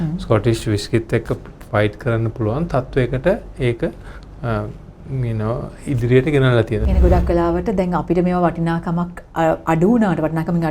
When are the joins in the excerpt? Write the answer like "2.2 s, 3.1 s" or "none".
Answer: 6.8 s